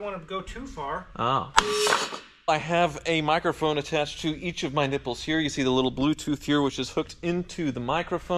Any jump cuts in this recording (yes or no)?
yes